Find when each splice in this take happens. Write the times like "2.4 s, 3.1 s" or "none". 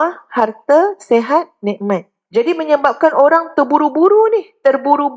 2.2 s